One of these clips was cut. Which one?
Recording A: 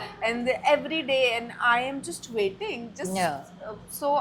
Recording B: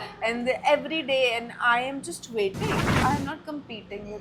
B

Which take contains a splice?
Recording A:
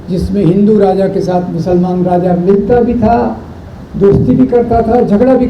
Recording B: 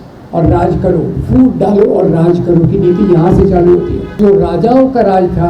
B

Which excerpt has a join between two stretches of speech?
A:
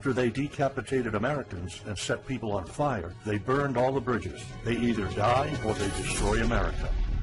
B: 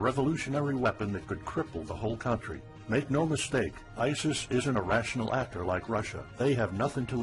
A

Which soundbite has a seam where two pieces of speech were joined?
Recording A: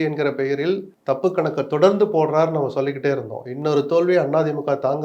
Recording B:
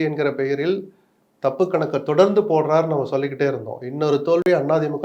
A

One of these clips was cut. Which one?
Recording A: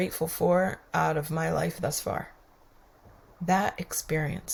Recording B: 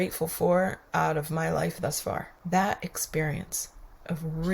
B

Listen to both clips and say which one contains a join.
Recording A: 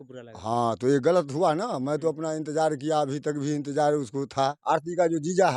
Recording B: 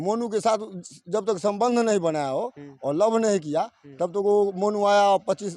A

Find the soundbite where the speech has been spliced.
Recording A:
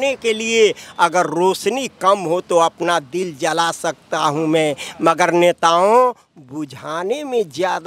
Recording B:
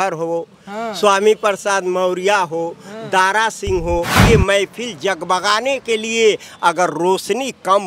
B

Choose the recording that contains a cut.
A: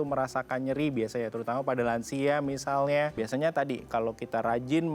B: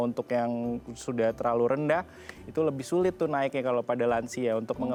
A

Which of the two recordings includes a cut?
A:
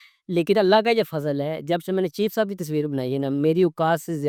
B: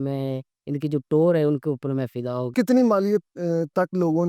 B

